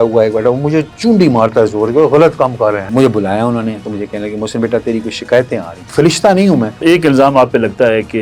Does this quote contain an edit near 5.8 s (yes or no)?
yes